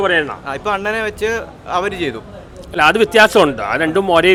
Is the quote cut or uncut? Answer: uncut